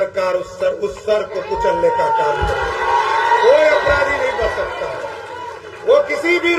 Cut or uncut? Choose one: uncut